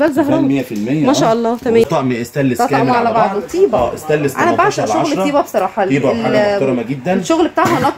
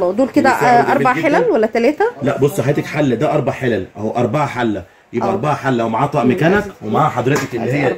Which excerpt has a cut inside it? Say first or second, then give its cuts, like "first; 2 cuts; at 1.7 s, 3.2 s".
first; 1 cut; at 1.8 s